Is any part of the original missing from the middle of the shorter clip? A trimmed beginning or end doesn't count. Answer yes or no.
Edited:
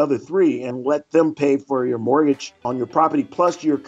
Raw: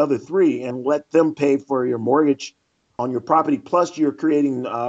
yes